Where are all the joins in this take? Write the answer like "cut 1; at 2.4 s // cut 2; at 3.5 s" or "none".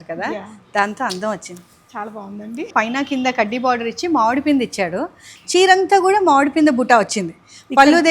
cut 1; at 2.7 s